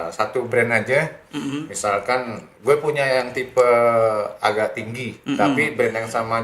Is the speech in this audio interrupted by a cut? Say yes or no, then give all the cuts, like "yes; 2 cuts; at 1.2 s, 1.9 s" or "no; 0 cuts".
yes; 1 cut; at 2.4 s